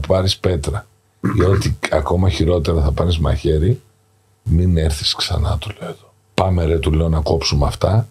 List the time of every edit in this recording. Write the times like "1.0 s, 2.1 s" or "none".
6.1 s